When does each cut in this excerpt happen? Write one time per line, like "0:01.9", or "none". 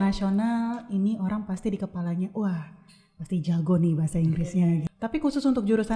0:04.9